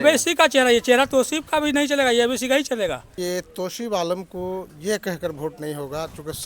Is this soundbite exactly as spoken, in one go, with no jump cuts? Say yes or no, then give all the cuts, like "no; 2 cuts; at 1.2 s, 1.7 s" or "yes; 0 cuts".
no; 1 cut; at 3.1 s